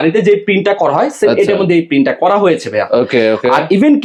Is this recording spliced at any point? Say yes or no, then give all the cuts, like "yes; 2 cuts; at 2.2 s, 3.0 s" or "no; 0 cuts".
no; 0 cuts